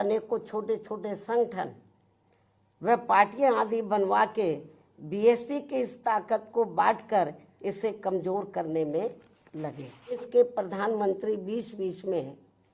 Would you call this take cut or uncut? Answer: cut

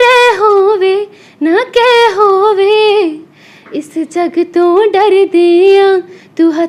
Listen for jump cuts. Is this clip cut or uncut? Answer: uncut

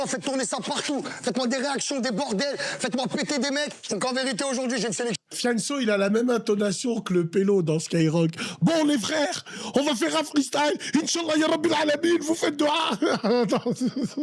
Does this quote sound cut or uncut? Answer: uncut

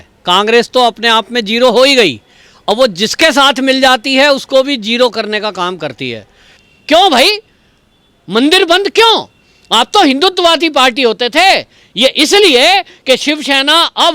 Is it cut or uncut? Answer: cut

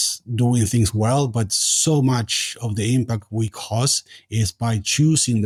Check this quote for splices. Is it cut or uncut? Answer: uncut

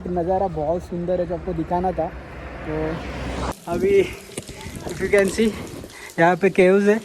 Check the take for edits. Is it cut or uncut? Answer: cut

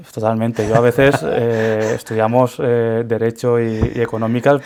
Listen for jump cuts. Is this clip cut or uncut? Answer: uncut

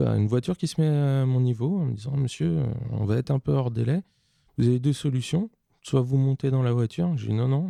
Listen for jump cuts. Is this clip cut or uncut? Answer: uncut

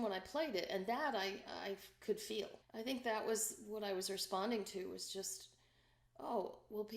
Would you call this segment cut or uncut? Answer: cut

